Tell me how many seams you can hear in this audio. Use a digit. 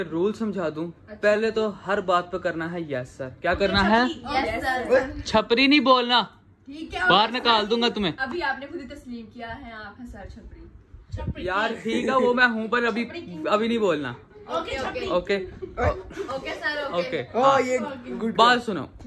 0